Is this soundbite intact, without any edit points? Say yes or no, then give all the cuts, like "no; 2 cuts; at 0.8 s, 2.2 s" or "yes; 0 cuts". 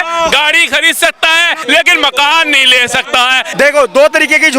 no; 2 cuts; at 1.6 s, 3.4 s